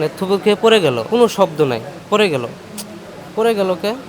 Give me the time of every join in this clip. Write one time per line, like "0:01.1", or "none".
0:01.0

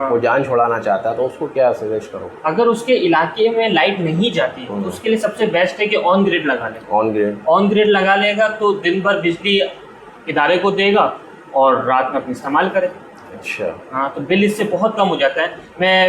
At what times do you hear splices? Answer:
none

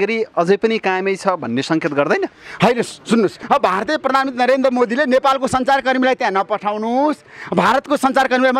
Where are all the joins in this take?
0:03.4

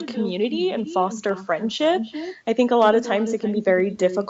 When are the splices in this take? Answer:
none

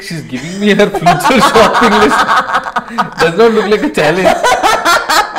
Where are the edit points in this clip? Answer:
none

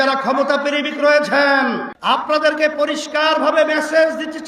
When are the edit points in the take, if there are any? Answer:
0:01.9

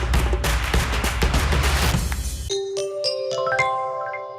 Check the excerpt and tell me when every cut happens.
0:02.3

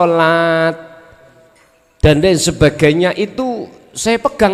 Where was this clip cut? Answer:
none

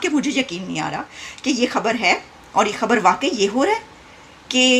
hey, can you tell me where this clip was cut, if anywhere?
none

